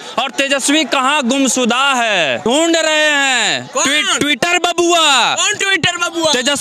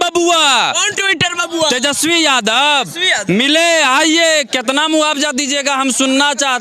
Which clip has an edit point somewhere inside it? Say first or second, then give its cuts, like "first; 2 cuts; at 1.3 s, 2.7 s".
first; 1 cut; at 2.5 s